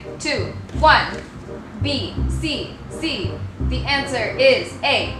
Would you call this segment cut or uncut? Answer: uncut